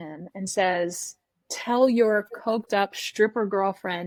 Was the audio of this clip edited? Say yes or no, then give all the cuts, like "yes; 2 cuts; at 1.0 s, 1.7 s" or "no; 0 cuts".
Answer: no; 0 cuts